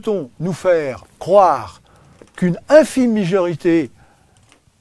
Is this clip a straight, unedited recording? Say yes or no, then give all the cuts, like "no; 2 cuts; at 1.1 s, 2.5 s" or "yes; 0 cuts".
yes; 0 cuts